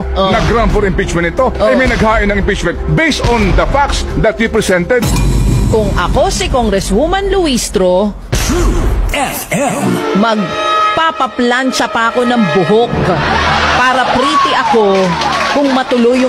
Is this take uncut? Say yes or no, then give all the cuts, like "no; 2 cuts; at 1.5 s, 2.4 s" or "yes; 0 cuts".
yes; 0 cuts